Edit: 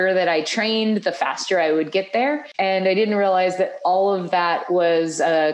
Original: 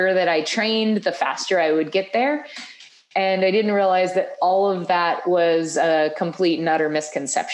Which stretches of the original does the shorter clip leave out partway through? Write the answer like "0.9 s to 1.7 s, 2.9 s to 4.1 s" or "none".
2.5 s to 3.0 s